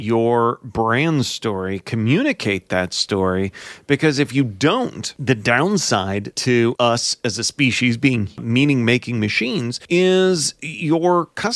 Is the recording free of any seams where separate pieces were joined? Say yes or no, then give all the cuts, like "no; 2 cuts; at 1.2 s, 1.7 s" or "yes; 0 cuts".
no; 4 cuts; at 5.1 s, 6.6 s, 8.4 s, 9.8 s